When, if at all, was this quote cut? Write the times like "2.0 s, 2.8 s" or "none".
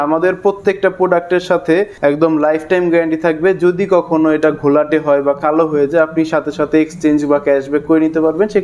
1.9 s